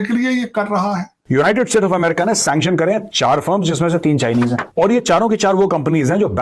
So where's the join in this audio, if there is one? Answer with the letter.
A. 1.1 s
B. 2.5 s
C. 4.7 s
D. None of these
A